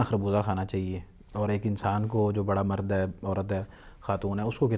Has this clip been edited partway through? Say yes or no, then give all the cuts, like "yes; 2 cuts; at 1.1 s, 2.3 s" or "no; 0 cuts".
no; 0 cuts